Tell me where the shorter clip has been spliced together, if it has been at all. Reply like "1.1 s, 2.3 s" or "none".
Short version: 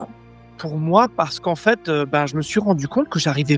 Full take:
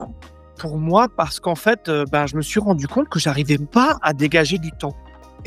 none